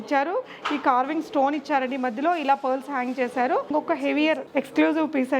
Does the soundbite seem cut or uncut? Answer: cut